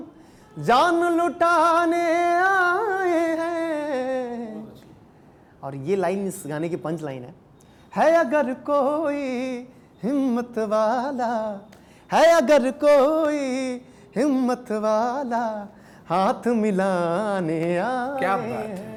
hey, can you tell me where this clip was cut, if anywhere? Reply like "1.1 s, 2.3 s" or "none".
none

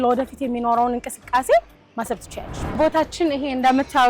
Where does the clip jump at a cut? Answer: 2.7 s

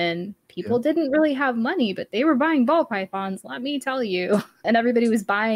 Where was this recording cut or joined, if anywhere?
4.6 s

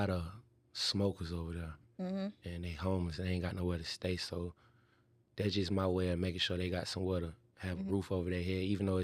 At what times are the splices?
none

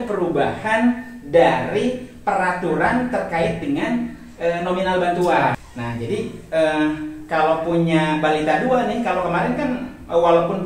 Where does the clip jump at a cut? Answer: 5.6 s

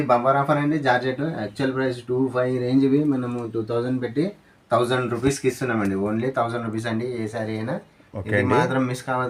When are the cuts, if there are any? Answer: none

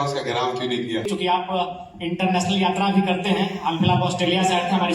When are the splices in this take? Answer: 1.1 s

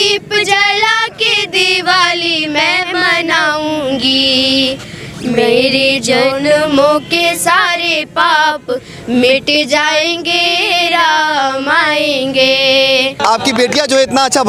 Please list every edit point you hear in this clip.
13.2 s

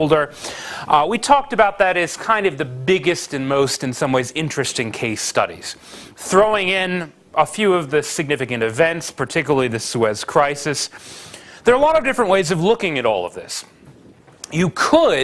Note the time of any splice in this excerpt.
none

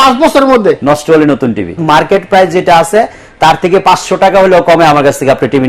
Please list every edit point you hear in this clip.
1.8 s

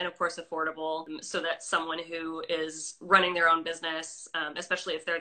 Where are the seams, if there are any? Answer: 1.2 s

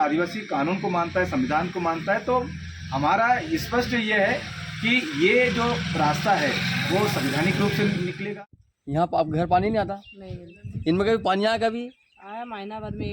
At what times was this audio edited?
8.2 s

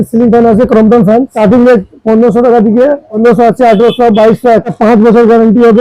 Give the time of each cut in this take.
1.3 s, 3.2 s, 4.8 s

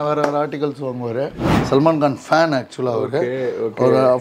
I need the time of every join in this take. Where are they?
1.4 s

